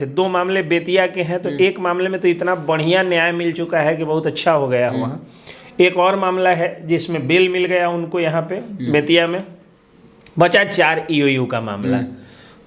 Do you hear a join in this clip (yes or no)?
no